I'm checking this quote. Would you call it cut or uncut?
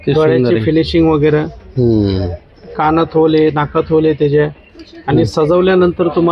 uncut